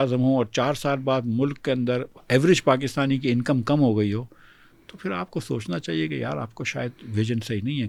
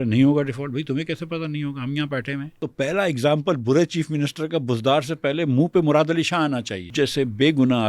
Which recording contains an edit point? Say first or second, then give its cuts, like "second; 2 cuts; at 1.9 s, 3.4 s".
second; 2 cuts; at 2.5 s, 6.9 s